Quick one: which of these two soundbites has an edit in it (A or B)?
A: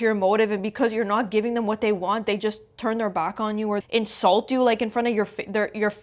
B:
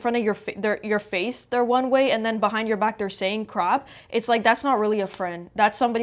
A